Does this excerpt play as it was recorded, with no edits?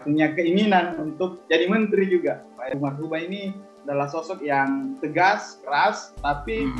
no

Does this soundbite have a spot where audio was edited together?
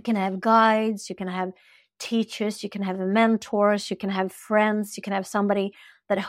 no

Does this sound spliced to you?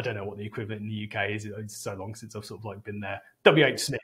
no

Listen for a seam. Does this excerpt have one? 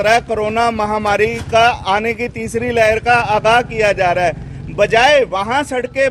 no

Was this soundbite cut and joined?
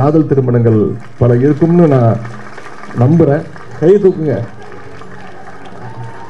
yes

